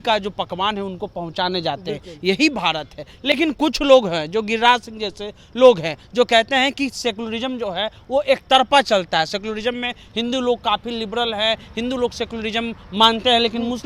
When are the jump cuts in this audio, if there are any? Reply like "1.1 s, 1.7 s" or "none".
none